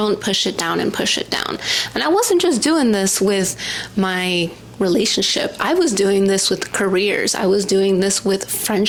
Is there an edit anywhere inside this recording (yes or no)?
no